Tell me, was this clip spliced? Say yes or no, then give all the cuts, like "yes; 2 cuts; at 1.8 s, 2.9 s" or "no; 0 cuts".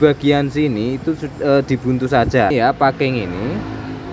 yes; 1 cut; at 2.5 s